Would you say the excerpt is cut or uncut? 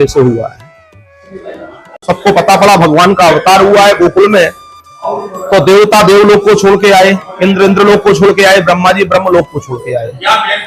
cut